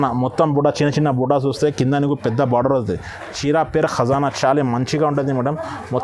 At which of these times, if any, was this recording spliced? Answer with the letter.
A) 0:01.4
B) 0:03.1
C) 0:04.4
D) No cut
D